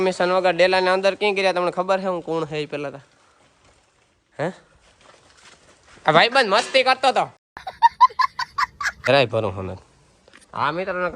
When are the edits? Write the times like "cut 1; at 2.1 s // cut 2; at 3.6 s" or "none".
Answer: cut 1; at 7.4 s // cut 2; at 9.1 s